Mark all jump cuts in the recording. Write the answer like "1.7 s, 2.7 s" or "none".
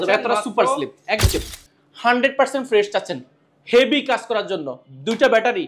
1.2 s

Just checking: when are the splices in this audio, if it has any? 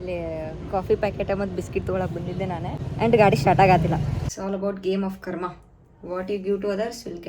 2.8 s, 4.4 s

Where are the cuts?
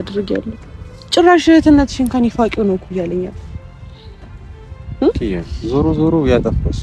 none

